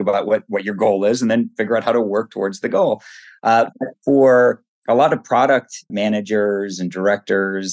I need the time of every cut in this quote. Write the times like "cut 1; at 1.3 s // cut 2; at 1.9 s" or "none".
cut 1; at 5.8 s

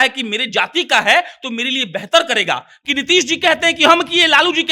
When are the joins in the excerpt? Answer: cut 1; at 2.8 s

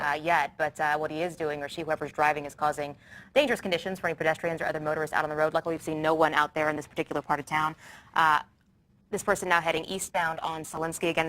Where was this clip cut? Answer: cut 1; at 3.9 s

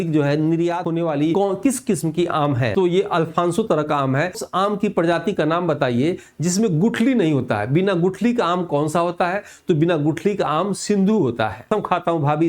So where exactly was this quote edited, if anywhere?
cut 1; at 1.0 s // cut 2; at 2.7 s // cut 3; at 4.4 s // cut 4; at 11.7 s

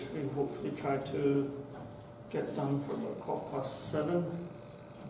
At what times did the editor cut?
cut 1; at 3.2 s

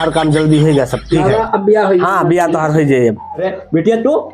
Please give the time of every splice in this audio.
cut 1; at 3.4 s

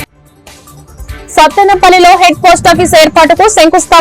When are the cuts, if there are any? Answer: cut 1; at 1.3 s

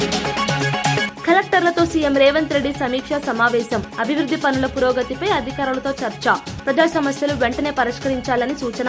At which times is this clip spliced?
cut 1; at 1.1 s

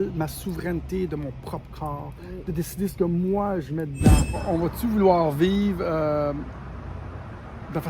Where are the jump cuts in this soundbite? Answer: cut 1; at 4.4 s

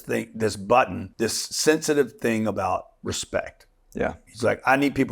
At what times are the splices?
cut 1; at 1.0 s

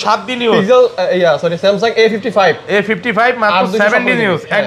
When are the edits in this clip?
none

